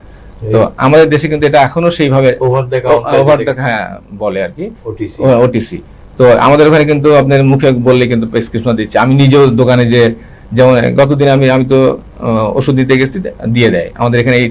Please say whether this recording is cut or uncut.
uncut